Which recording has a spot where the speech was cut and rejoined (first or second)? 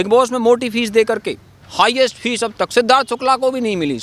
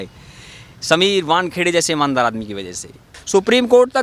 second